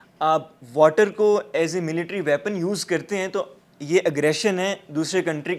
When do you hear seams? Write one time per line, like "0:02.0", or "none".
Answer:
none